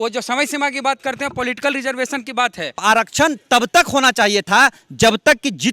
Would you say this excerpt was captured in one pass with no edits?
no; 1 cut; at 2.8 s

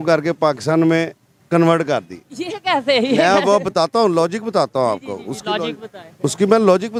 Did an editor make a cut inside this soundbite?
no; 0 cuts

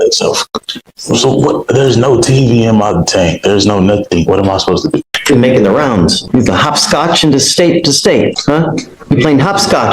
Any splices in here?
yes; 1 cut; at 5.1 s

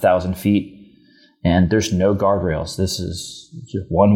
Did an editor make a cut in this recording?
no; 0 cuts

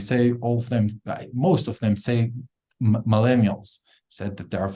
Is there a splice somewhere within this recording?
no; 0 cuts

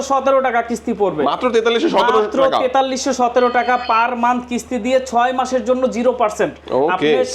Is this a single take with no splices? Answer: yes; 0 cuts

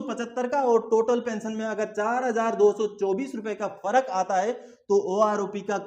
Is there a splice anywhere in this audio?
no; 0 cuts

